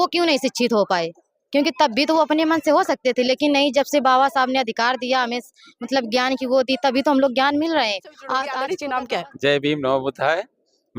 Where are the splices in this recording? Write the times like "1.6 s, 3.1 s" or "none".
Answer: 8.6 s